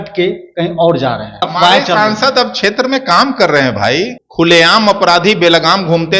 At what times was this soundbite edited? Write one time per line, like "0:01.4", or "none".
0:01.5
0:04.2